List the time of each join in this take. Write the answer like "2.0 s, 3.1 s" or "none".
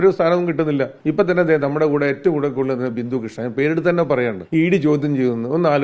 1.0 s, 4.4 s